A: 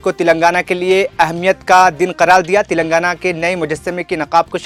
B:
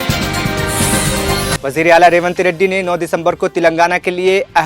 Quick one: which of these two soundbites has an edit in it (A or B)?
B